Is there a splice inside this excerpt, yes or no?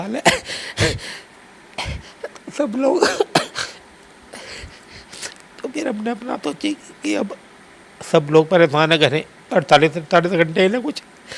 no